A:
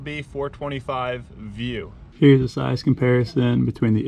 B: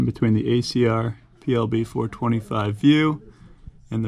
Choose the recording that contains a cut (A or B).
A